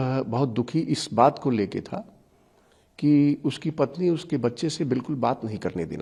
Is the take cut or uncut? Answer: uncut